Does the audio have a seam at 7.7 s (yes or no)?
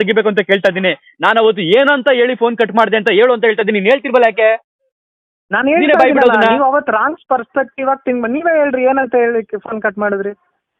no